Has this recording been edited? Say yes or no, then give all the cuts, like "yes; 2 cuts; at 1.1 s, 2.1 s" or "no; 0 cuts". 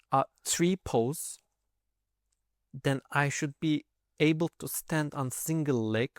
no; 0 cuts